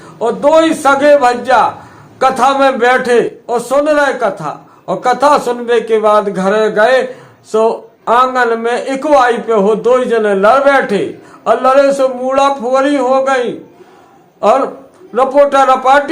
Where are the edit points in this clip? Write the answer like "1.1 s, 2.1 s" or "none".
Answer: 3.4 s, 7.9 s